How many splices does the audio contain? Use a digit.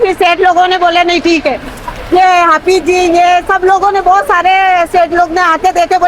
0